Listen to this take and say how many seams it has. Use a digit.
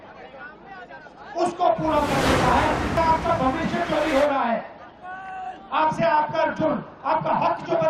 1